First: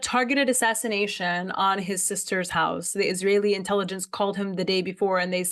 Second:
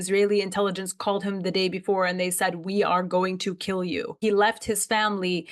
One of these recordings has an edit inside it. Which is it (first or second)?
second